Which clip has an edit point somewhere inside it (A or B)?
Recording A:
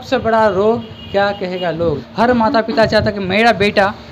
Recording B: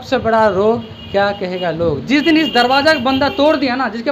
A